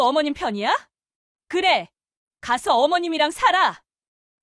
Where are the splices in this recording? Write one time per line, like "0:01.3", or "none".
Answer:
none